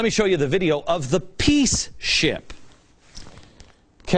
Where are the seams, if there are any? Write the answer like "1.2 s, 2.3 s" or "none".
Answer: 1.6 s